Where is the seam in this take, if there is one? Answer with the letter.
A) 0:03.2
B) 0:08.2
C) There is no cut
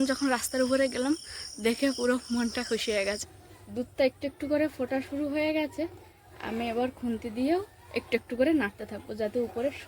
A